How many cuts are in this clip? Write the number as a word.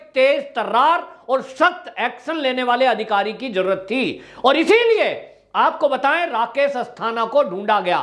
zero